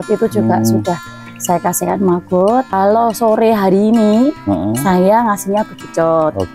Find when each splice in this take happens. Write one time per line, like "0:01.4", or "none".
0:02.7